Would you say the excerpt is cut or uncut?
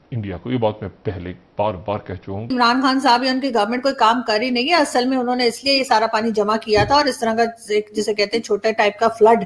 cut